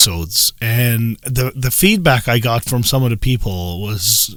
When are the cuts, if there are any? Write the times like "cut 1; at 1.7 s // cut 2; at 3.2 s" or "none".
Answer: none

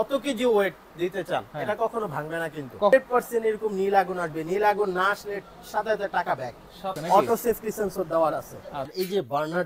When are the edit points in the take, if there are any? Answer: cut 1; at 2.9 s // cut 2; at 7.0 s // cut 3; at 8.9 s

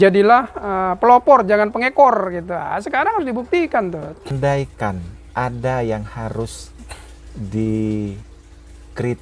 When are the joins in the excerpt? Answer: cut 1; at 4.3 s

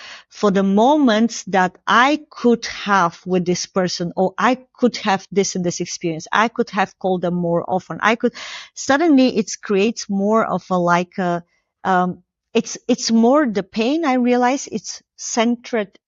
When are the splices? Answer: none

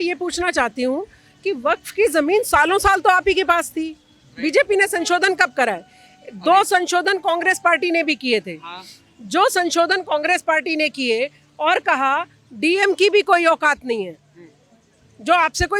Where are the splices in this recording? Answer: none

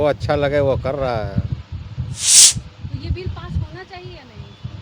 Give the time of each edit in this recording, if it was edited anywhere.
cut 1; at 2.3 s

